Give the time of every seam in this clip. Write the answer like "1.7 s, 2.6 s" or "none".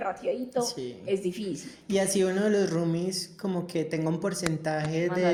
none